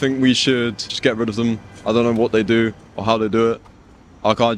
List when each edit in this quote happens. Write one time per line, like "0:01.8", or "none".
none